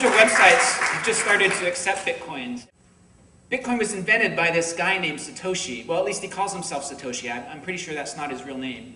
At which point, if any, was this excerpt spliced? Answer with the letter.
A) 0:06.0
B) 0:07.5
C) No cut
A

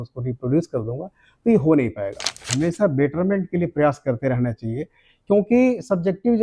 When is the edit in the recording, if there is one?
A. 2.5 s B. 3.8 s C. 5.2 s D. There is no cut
A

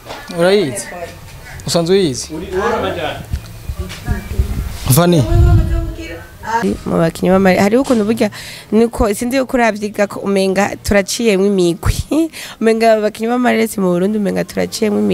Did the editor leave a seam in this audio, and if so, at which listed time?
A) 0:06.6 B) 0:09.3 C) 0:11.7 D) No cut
A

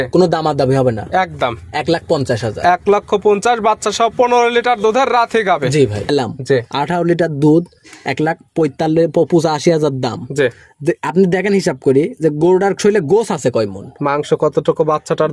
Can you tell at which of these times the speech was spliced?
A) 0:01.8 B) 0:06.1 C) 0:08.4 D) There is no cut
B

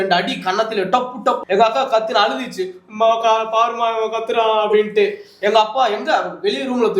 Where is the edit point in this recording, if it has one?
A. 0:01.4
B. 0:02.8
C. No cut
A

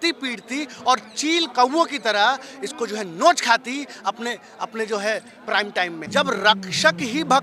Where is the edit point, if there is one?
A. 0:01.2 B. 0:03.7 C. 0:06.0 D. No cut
C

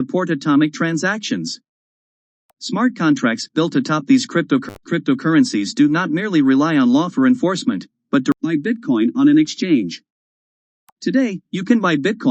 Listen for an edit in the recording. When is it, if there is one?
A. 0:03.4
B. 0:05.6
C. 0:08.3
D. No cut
C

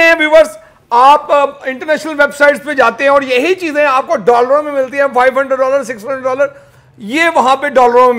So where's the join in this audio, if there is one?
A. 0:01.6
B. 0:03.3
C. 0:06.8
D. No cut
D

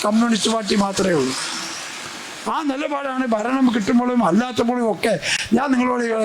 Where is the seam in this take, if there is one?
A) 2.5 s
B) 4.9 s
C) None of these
C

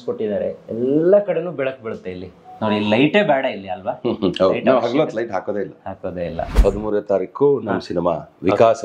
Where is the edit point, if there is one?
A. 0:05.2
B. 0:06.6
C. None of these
B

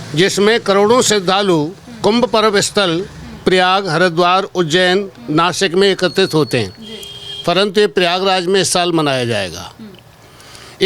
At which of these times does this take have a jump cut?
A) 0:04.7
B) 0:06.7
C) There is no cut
C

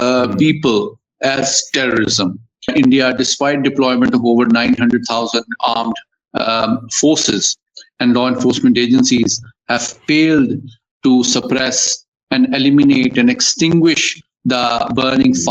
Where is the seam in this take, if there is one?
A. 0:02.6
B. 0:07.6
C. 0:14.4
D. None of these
A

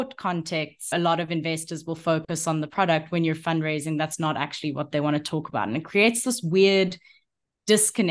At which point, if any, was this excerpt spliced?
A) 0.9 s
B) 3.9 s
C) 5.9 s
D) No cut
A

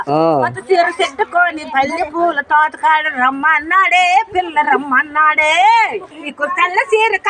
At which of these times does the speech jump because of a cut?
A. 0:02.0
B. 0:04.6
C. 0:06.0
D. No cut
C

